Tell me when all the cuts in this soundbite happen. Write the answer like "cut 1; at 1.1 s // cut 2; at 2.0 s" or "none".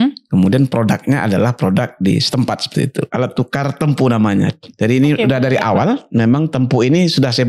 cut 1; at 3.1 s